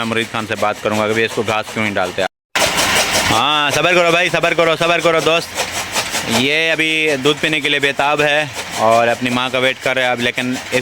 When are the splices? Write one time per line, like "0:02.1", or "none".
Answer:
0:02.3